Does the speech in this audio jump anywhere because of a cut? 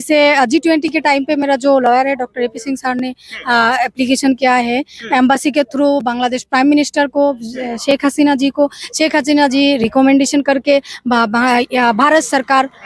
no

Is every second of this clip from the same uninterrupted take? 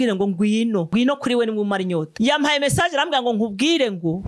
yes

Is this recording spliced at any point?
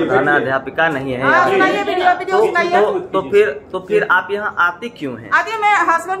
no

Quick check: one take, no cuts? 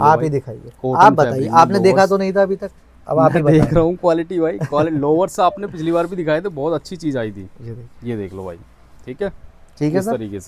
yes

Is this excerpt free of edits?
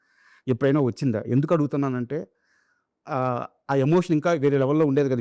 yes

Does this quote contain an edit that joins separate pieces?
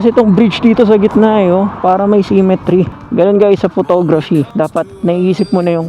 yes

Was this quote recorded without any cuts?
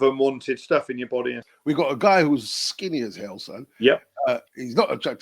no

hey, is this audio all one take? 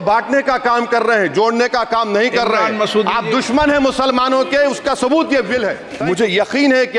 no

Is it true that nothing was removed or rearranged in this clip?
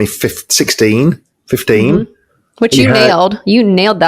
yes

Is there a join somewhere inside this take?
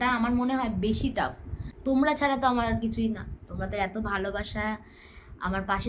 yes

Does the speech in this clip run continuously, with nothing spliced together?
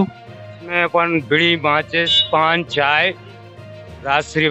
yes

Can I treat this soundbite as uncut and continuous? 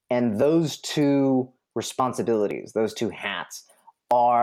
yes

